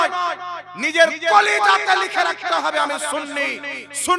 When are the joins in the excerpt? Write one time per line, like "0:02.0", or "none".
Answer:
none